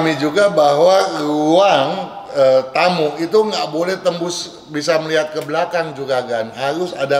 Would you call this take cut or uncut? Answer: uncut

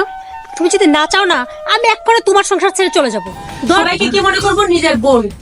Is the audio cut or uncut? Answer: cut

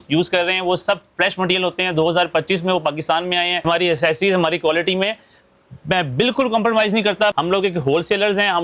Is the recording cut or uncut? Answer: cut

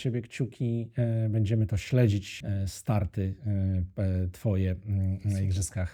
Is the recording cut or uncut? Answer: uncut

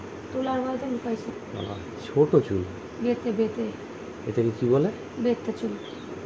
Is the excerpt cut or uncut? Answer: cut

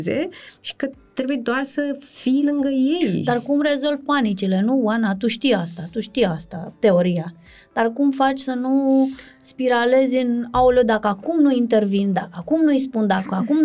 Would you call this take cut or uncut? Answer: uncut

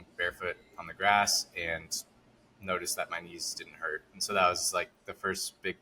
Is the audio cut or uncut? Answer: uncut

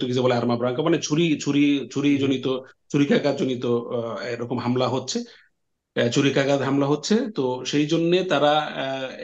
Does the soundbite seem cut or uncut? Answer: uncut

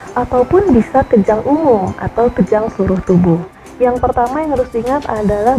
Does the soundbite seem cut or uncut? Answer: cut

